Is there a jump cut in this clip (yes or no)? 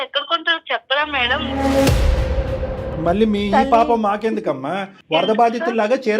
yes